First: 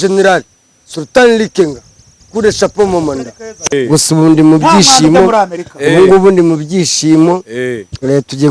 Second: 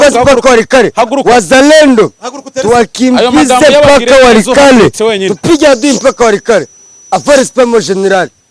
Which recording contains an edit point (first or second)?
first